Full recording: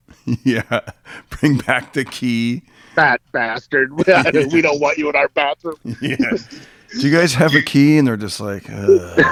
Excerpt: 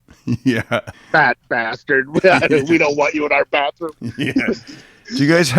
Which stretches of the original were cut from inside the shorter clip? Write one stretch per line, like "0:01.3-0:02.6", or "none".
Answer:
0:01.0-0:02.8